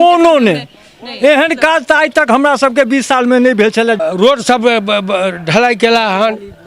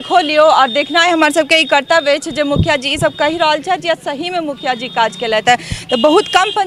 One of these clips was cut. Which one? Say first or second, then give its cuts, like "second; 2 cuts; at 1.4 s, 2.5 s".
first; 1 cut; at 4.0 s